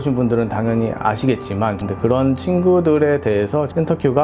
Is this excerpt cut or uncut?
cut